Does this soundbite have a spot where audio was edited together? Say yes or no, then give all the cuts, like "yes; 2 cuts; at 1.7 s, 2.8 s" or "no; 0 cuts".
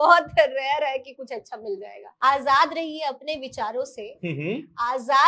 yes; 1 cut; at 2.1 s